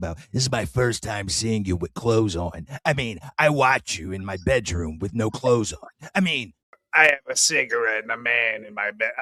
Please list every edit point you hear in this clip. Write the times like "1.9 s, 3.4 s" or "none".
none